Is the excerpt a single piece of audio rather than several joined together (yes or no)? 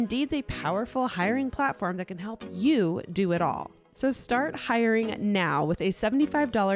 no